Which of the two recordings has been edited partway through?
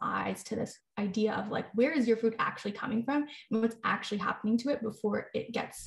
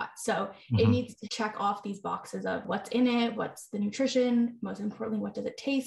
second; 3 cuts; at 1.2 s, 2.7 s, 3.4 s

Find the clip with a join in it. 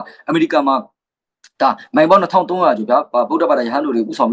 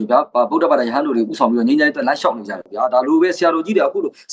second; 1 cut; at 2.6 s

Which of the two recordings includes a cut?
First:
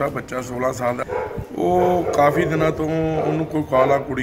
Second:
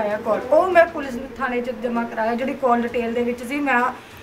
first; 1 cut; at 1.0 s

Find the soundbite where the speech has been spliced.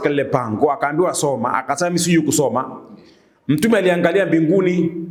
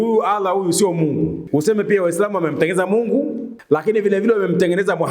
second; 2 cuts; at 1.4 s, 3.5 s

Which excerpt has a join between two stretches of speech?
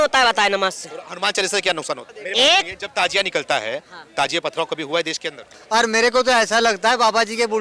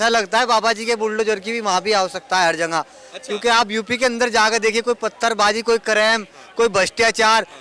first; 2 cuts; at 2.1 s, 5.5 s

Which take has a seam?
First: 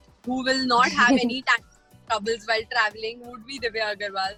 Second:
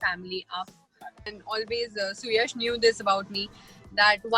second; 1 cut; at 1.3 s

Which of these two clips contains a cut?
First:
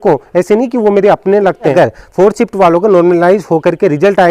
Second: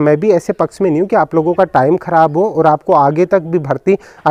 first; 1 cut; at 1.7 s

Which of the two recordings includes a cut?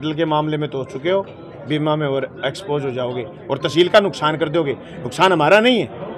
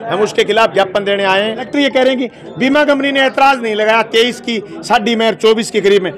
second; 1 cut; at 1.7 s

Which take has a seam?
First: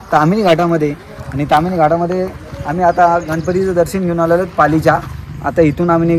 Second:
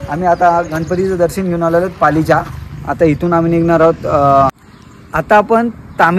second; 1 cut; at 4.6 s

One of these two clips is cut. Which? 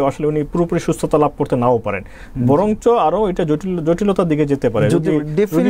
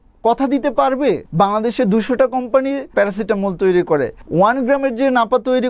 second; 3 cuts; at 1.2 s, 2.9 s, 4.2 s

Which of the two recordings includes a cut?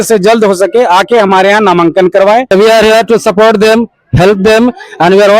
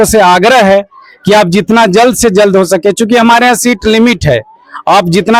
first; 1 cut; at 2.5 s

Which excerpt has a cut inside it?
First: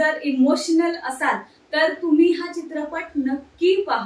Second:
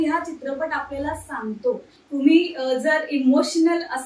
second; 1 cut; at 1.9 s

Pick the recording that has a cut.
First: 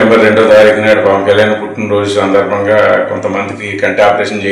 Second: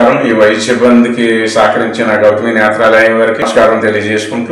second; 1 cut; at 3.4 s

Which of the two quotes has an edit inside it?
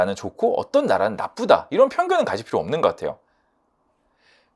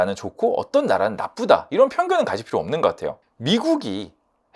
second; 1 cut; at 3.3 s

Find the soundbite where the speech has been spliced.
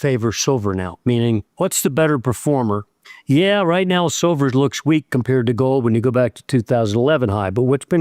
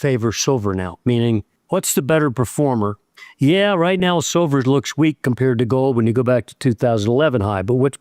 first; 1 cut; at 1.5 s

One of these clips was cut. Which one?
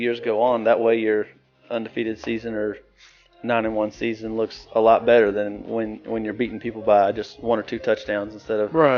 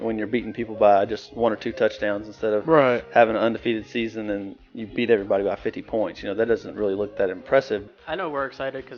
second; 1 cut; at 7.8 s

